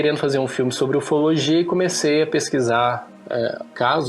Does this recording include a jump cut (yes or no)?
no